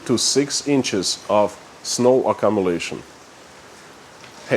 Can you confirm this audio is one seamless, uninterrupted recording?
yes; 0 cuts

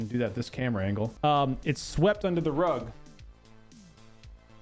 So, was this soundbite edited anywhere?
yes; 1 cut; at 1.1 s

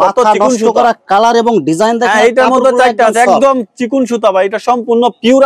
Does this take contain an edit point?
no; 0 cuts

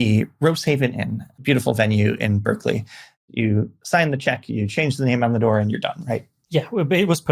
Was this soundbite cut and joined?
yes; 2 cuts; at 1.2 s, 3.1 s

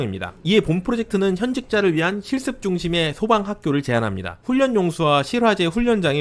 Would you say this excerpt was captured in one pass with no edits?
yes; 0 cuts

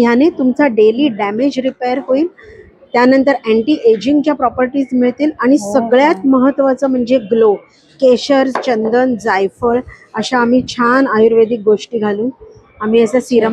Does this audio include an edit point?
no; 0 cuts

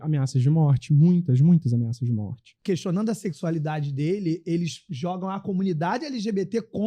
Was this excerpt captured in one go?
no; 1 cut; at 2.5 s

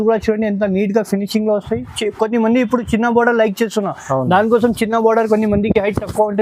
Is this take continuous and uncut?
yes; 0 cuts

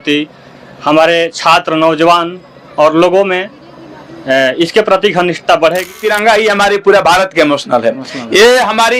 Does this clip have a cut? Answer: yes; 1 cut; at 6.0 s

